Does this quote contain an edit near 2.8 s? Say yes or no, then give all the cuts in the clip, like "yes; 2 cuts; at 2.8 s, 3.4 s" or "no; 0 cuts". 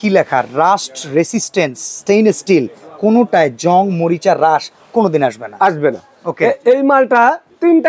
no; 0 cuts